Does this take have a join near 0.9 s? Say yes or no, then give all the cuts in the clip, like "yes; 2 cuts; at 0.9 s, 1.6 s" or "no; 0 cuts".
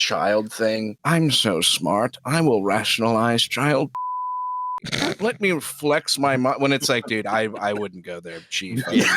yes; 1 cut; at 0.9 s